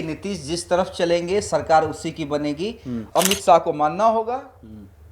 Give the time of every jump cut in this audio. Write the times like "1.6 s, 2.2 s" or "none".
3.1 s